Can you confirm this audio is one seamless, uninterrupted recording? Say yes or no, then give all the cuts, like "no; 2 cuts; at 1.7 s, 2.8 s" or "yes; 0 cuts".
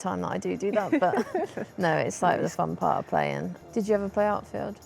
no; 1 cut; at 3.7 s